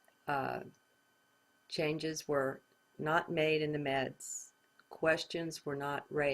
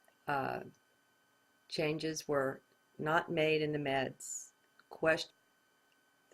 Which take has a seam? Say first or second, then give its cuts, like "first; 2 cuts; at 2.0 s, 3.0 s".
first; 1 cut; at 5.3 s